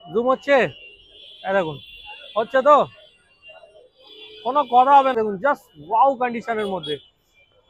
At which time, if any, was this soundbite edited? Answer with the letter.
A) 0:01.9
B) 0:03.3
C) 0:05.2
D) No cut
C